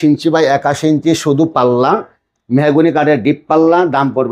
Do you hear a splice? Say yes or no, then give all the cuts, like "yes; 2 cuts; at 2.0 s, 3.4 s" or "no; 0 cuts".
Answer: no; 0 cuts